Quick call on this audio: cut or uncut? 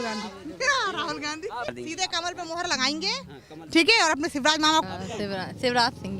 cut